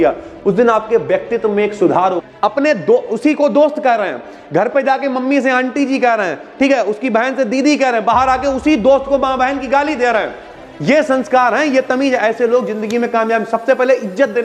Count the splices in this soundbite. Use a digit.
1